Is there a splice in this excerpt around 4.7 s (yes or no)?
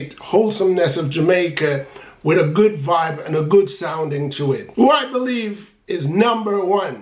yes